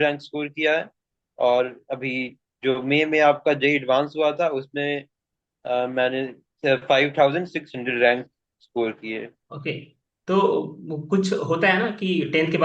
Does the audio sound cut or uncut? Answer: cut